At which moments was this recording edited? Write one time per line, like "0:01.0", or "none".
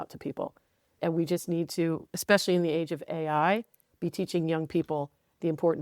0:01.0